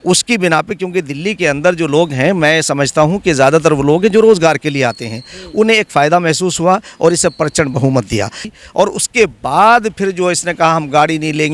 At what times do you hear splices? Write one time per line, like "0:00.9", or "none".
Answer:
0:08.4